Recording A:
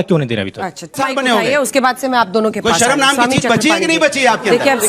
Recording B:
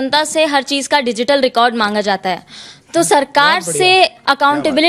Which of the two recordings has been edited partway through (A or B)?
A